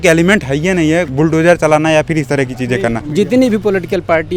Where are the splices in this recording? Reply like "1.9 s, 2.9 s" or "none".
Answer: 1.1 s, 3.0 s